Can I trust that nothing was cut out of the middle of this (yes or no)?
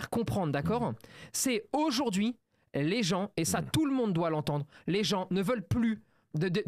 yes